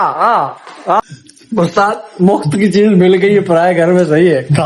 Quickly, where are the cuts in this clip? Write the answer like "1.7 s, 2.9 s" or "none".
1.0 s